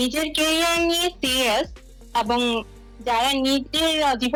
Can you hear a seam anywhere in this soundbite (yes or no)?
no